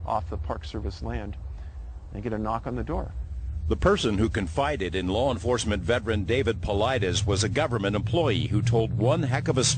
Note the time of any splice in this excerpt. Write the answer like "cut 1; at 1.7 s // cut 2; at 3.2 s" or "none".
none